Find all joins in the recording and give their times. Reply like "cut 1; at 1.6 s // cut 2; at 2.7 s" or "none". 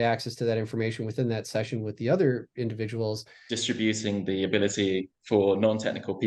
cut 1; at 3.5 s